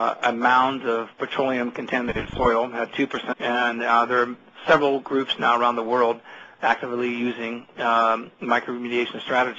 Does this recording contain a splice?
no; 0 cuts

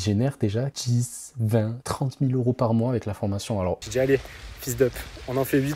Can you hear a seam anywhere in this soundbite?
yes; 1 cut; at 3.8 s

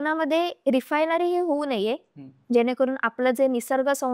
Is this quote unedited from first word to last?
yes; 0 cuts

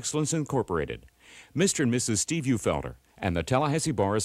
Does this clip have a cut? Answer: no; 0 cuts

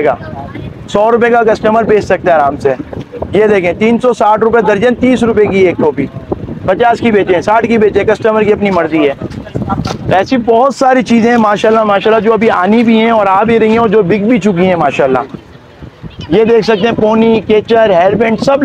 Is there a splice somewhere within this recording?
no; 0 cuts

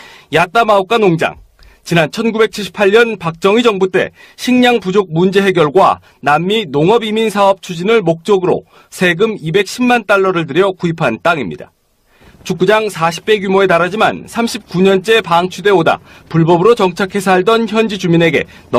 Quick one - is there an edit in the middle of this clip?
yes; 1 cut; at 9.1 s

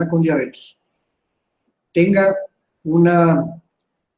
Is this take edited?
yes; 1 cut; at 2.9 s

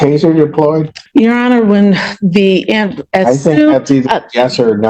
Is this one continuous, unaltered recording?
no; 1 cut; at 0.9 s

